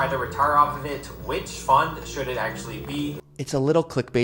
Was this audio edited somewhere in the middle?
yes; 1 cut; at 3.2 s

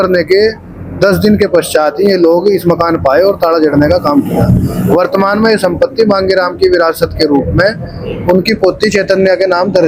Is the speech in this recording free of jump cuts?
yes; 0 cuts

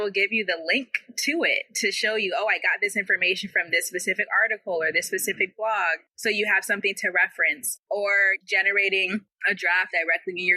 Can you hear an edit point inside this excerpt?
yes; 3 cuts; at 6.1 s, 7.7 s, 9.3 s

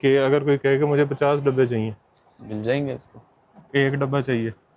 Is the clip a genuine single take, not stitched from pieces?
yes; 0 cuts

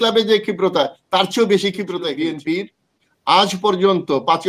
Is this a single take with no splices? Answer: no; 1 cut; at 2.2 s

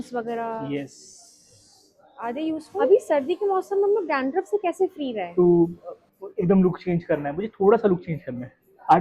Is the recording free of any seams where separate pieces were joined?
no; 2 cuts; at 2.9 s, 5.2 s

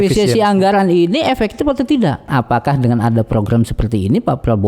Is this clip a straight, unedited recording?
no; 1 cut; at 2.3 s

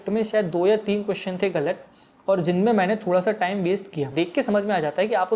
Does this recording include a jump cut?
yes; 1 cut; at 4.1 s

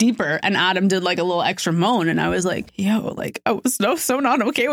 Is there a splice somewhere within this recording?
yes; 1 cut; at 2.7 s

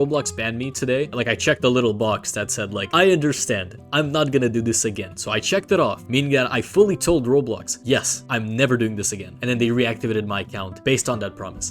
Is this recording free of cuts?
no; 1 cut; at 1.1 s

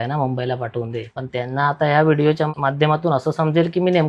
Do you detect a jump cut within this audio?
yes; 2 cuts; at 1.2 s, 2.5 s

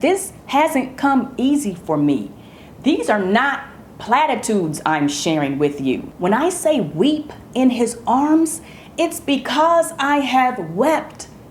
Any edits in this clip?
no; 0 cuts

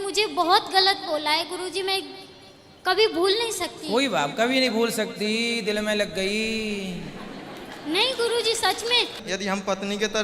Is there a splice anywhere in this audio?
yes; 1 cut; at 9.2 s

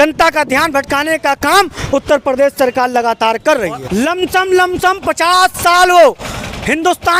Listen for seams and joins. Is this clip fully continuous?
no; 1 cut; at 3.8 s

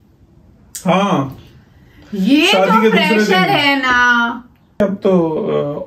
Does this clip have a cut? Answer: yes; 1 cut; at 4.8 s

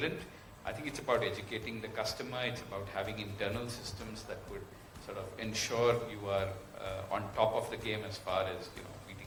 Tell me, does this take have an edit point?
no; 0 cuts

